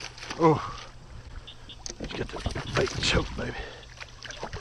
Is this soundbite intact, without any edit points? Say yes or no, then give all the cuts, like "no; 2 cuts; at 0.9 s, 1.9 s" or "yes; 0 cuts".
yes; 0 cuts